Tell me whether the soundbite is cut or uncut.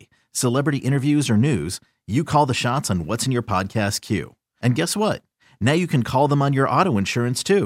uncut